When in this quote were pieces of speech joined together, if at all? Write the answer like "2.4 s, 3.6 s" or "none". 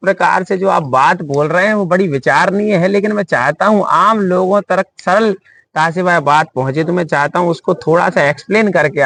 none